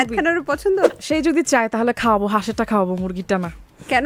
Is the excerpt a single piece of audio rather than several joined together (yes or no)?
no